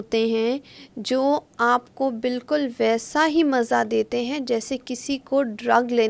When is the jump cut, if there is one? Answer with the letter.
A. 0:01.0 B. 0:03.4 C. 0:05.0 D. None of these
D